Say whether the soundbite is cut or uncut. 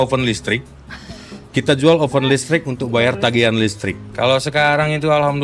cut